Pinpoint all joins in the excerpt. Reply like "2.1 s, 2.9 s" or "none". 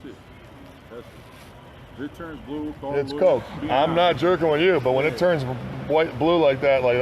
3.5 s